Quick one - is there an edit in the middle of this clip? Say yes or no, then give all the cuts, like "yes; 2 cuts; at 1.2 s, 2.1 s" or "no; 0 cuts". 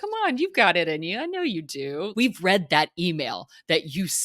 yes; 1 cut; at 2.0 s